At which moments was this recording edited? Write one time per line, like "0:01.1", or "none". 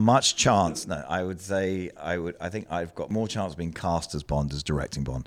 0:03.1